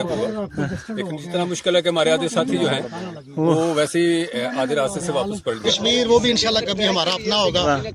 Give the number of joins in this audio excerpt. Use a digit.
1